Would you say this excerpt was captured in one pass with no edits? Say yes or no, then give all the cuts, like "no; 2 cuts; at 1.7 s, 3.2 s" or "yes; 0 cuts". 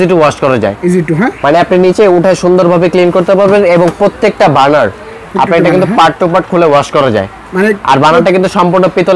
yes; 0 cuts